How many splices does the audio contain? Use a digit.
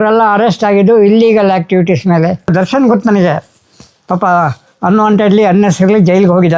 1